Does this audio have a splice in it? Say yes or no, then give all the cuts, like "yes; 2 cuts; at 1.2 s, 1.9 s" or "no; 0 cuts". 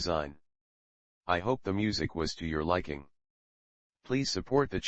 no; 0 cuts